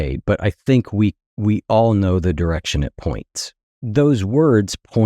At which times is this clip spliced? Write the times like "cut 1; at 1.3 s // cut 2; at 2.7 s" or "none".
cut 1; at 3.8 s